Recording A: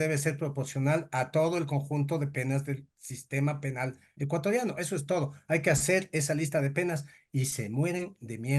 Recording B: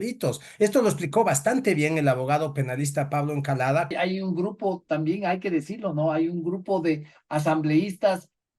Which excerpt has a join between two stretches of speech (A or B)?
B